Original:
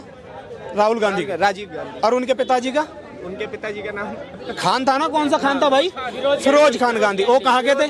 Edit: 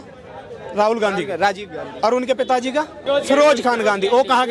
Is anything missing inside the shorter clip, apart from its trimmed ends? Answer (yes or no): yes